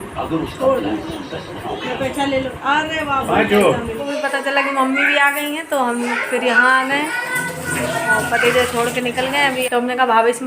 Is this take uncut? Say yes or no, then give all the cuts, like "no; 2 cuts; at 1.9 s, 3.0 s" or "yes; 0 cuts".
no; 2 cuts; at 4.0 s, 9.7 s